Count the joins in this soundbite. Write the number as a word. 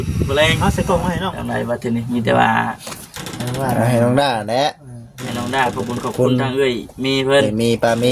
one